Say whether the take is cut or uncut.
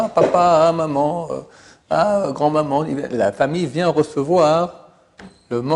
uncut